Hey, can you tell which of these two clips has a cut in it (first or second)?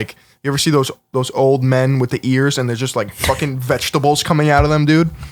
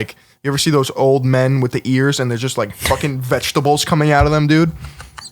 second